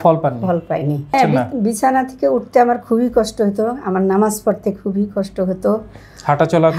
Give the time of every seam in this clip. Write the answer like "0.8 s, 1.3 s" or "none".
1.1 s